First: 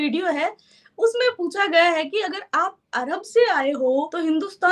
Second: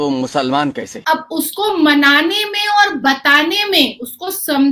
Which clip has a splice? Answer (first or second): second